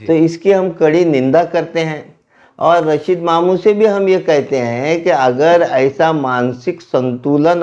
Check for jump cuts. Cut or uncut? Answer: uncut